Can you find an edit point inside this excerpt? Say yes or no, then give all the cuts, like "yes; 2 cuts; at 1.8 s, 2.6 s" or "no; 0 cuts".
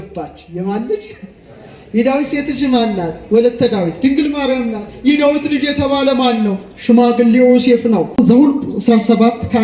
yes; 1 cut; at 8.1 s